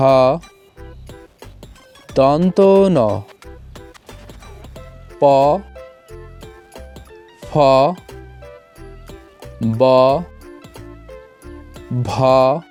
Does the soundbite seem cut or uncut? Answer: uncut